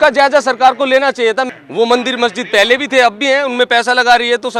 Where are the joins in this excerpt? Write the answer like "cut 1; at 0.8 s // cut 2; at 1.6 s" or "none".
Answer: cut 1; at 1.6 s